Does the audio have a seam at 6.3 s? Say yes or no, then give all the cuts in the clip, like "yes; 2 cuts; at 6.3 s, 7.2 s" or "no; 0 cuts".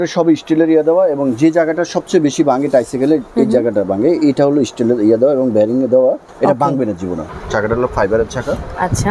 yes; 2 cuts; at 6.3 s, 7.3 s